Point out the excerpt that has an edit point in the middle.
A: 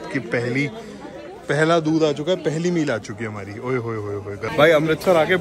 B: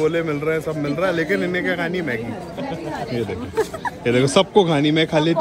A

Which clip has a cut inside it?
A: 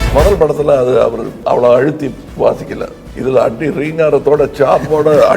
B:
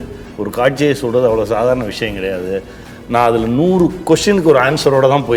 A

